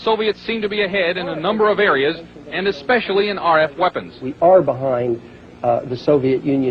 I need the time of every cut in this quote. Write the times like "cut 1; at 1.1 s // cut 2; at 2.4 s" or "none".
none